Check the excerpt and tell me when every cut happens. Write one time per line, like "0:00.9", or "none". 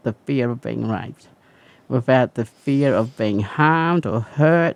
none